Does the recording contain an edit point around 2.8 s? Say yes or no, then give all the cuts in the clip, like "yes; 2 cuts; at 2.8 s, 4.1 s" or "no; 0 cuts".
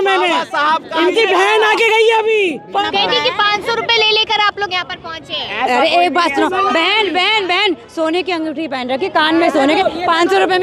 yes; 1 cut; at 2.8 s